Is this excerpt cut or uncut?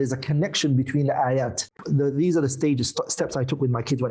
cut